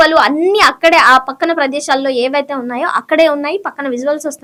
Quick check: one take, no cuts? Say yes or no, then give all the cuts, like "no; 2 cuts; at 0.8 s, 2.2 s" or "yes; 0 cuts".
yes; 0 cuts